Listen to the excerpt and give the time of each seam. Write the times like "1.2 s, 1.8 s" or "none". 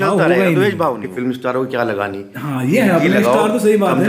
1.1 s